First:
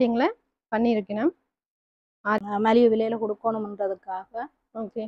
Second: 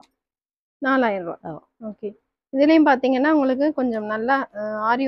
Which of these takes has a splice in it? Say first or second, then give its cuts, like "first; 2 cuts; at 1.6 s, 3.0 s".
first; 1 cut; at 2.4 s